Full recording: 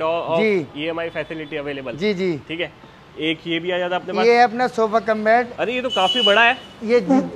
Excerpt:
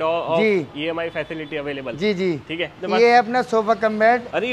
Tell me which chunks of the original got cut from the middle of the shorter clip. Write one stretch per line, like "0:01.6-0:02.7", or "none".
0:02.8-0:04.1